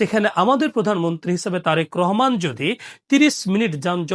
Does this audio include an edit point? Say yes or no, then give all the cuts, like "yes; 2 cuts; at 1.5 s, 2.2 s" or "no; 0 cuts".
no; 0 cuts